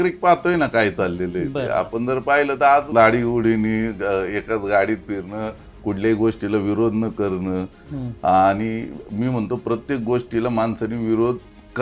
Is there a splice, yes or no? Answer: no